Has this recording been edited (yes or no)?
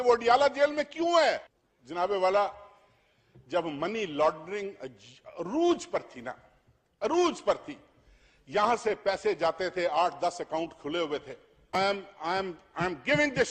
no